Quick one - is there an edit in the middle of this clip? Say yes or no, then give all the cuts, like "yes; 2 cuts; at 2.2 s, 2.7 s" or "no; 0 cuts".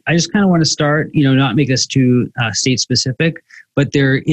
no; 0 cuts